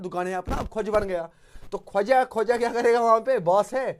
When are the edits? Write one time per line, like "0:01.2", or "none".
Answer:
none

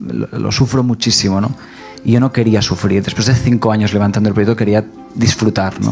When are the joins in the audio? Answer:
0:05.0

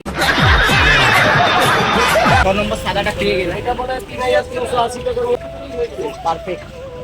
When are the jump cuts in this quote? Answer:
0:02.4
0:05.4

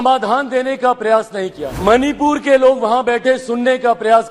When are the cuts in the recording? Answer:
0:01.7

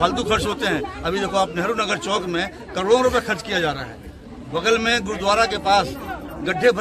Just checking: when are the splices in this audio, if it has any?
none

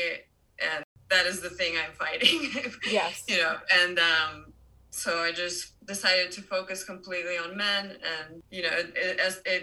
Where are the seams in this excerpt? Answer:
0:08.4

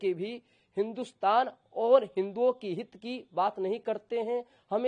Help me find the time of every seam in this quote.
none

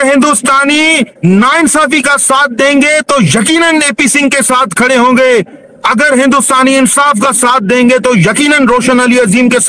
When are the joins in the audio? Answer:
none

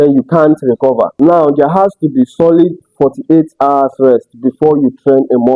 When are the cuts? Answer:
0:01.1

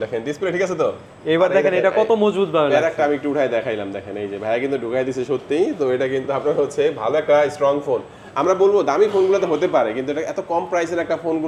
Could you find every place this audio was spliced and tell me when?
none

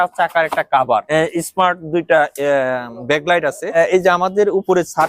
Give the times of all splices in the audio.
0:01.1
0:03.8

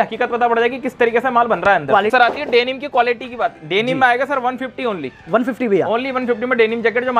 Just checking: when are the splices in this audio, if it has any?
0:02.1

